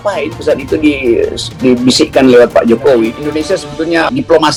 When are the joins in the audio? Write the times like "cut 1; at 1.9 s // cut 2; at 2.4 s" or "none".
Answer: none